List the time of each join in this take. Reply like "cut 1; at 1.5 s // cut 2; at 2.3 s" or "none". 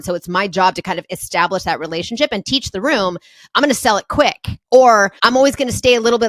cut 1; at 4.5 s // cut 2; at 5.1 s